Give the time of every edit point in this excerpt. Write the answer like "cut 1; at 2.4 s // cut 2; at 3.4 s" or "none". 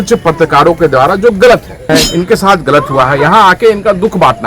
cut 1; at 1.9 s

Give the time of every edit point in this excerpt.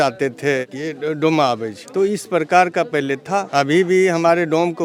none

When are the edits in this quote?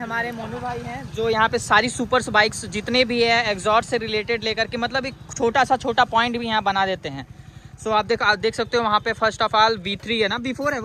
none

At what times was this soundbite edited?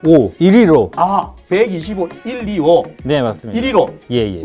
cut 1; at 0.9 s

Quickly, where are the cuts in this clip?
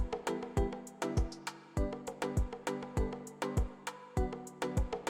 cut 1; at 2.8 s

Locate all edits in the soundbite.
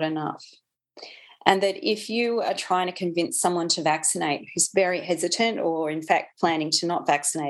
none

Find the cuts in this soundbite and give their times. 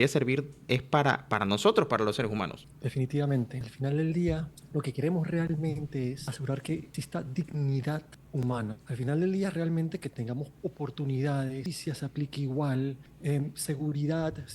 cut 1; at 2.7 s // cut 2; at 3.6 s // cut 3; at 4.6 s // cut 4; at 6.8 s // cut 5; at 8.2 s // cut 6; at 11.6 s // cut 7; at 13.1 s

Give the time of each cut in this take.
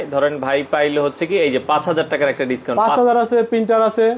none

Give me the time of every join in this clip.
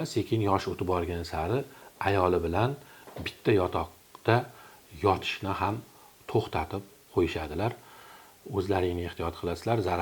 none

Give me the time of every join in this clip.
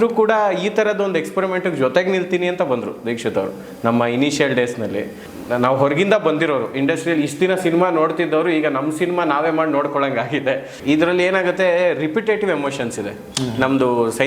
cut 1; at 5.2 s // cut 2; at 10.7 s

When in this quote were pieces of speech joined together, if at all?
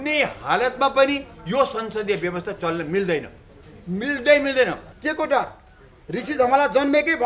cut 1; at 4.8 s

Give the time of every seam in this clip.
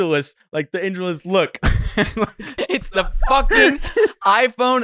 cut 1; at 2.6 s

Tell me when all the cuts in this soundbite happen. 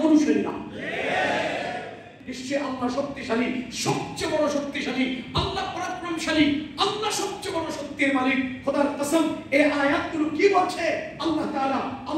cut 1; at 2.2 s

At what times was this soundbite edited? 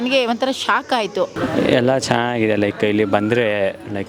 cut 1; at 1.3 s

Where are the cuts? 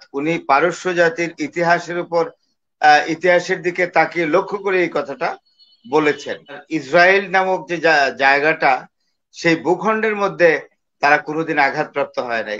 cut 1; at 6.7 s

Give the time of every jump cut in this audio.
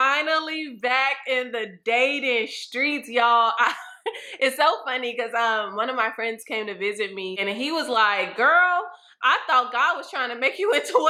none

